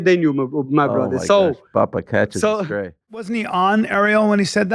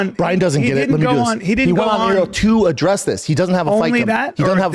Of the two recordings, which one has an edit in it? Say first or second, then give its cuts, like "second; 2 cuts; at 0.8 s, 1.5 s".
first; 1 cut; at 3.2 s